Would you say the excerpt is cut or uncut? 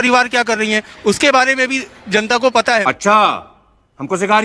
cut